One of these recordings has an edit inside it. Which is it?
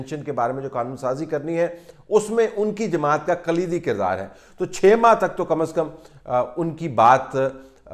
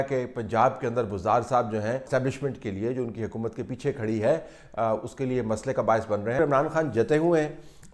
second; 2 cuts; at 2.1 s, 6.4 s

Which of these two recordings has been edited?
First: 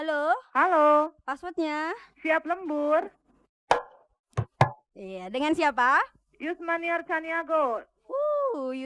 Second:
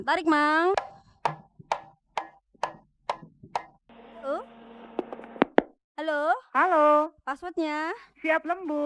second; 1 cut; at 3.8 s

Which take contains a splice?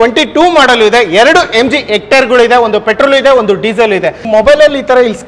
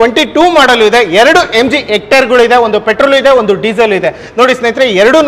first; 1 cut; at 4.2 s

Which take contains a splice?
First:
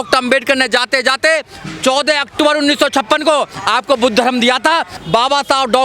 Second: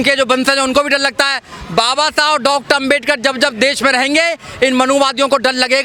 first; 1 cut; at 4.9 s

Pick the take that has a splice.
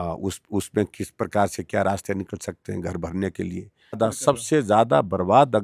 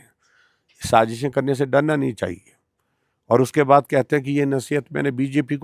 first; 1 cut; at 4.0 s

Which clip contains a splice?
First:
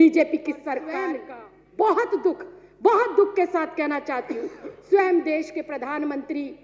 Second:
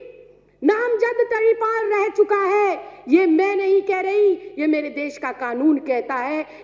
first; 1 cut; at 1.0 s

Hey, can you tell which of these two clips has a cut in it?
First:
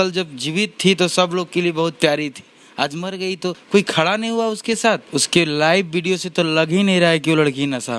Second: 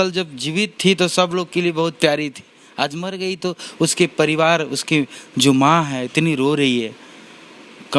first; 2 cuts; at 3.6 s, 5.0 s

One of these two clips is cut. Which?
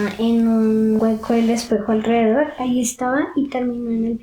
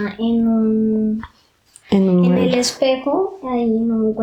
first; 1 cut; at 1.0 s

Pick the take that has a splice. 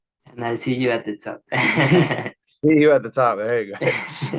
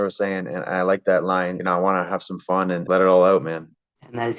second; 2 cuts; at 1.6 s, 2.8 s

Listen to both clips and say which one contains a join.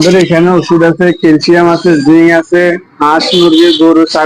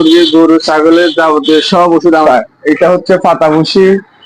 second; 1 cut; at 2.2 s

